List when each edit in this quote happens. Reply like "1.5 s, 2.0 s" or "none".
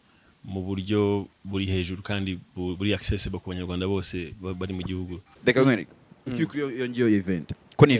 5.3 s